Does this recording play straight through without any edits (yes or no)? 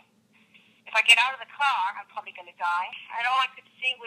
no